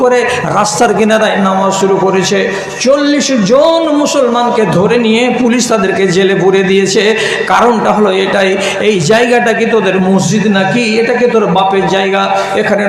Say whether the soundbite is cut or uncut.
uncut